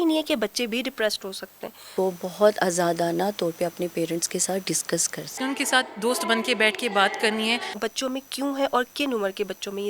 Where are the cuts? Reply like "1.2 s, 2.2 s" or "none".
1.8 s, 5.3 s, 7.7 s

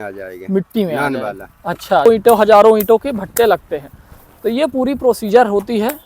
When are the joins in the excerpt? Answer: 2.1 s

